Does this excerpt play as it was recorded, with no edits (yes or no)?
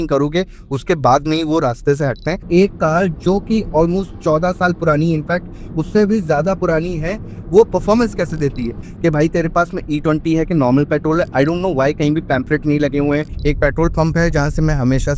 no